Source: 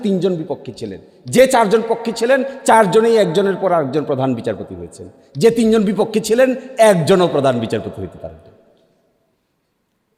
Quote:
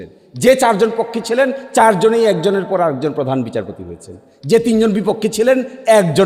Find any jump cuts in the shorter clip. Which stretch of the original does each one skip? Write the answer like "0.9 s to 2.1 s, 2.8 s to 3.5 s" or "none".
none